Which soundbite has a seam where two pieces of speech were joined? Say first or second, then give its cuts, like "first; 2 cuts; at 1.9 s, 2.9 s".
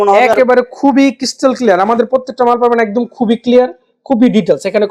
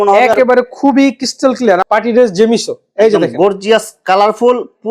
second; 1 cut; at 1.8 s